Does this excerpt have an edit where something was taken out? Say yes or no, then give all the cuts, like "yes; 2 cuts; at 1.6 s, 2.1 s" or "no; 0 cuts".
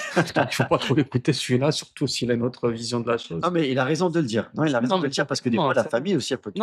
no; 0 cuts